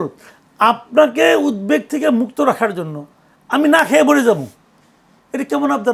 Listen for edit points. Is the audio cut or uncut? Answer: uncut